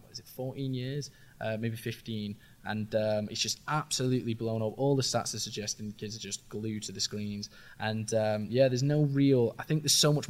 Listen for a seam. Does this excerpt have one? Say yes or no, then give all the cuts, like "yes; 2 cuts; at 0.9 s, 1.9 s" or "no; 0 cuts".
no; 0 cuts